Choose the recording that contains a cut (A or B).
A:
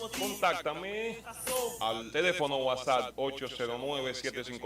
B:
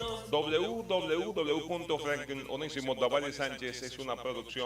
A